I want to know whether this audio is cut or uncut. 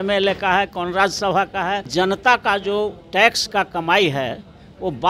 cut